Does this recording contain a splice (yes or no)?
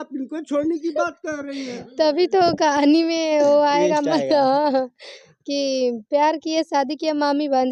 no